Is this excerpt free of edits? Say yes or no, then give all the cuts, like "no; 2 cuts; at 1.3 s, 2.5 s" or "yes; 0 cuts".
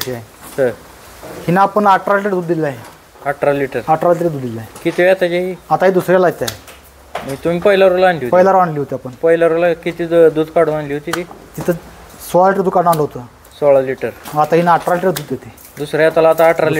yes; 0 cuts